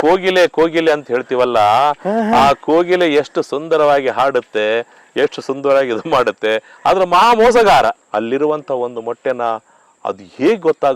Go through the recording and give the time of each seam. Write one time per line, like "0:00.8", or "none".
0:08.0